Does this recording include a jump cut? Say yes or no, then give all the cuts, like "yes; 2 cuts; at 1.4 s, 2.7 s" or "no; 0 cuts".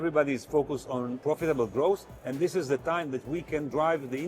yes; 1 cut; at 1.2 s